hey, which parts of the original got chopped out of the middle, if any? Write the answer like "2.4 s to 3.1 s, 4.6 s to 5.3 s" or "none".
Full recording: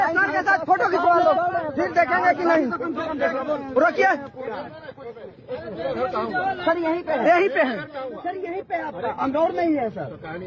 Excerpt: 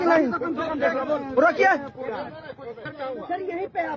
5.3 s to 7.9 s